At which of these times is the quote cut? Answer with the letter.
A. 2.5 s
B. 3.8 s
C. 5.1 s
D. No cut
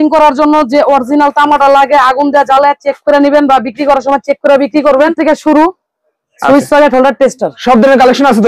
C